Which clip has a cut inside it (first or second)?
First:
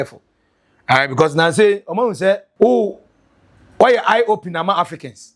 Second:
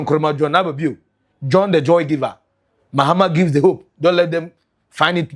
first